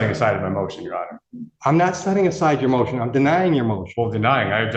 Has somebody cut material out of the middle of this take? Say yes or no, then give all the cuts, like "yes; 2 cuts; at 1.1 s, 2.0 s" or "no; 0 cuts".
no; 0 cuts